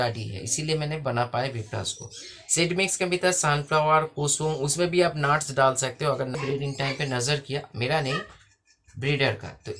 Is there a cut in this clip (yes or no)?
yes